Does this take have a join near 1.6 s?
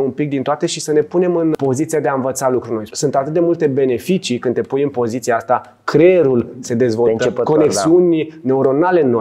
yes; 2 cuts; at 1.6 s, 2.9 s

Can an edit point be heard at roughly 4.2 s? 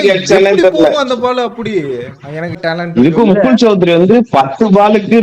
no; 1 cut; at 2.6 s

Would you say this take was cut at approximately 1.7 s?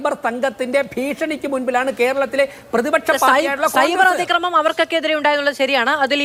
no; 0 cuts

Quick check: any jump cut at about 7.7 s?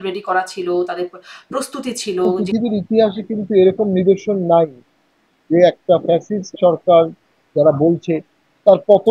no; 1 cut; at 2.4 s

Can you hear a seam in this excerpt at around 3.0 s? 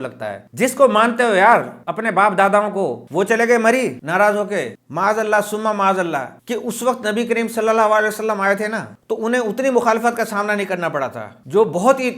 yes; 2 cuts; at 3.0 s, 4.7 s

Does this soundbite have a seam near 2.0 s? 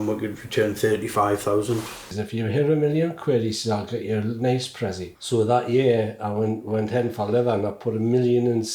yes; 2 cuts; at 2.0 s, 5.2 s

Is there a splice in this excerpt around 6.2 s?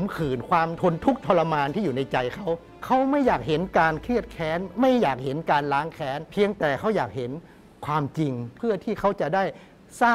yes; 4 cuts; at 0.8 s, 2.7 s, 6.2 s, 8.5 s

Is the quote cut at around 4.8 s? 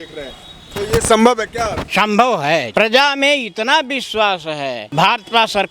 yes; 3 cuts; at 1.8 s, 2.7 s, 4.8 s

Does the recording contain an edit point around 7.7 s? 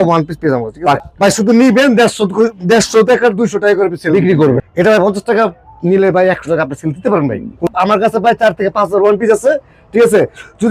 yes; 3 cuts; at 1.0 s, 4.6 s, 7.7 s

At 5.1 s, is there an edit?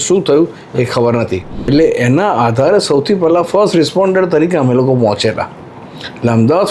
no; 1 cut; at 1.6 s

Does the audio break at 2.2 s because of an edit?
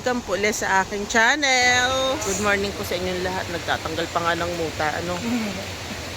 yes; 1 cut; at 2.2 s

